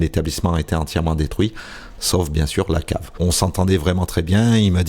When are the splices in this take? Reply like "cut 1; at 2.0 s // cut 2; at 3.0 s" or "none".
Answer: cut 1; at 3.2 s